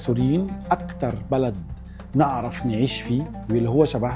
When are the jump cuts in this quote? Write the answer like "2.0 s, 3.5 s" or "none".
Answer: none